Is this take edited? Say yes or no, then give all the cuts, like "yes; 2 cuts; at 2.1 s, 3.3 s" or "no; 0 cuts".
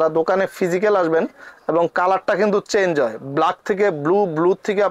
no; 0 cuts